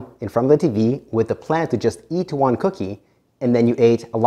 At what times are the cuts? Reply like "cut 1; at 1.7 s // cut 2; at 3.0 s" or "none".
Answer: none